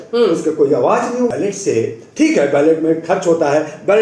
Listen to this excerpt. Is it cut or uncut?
cut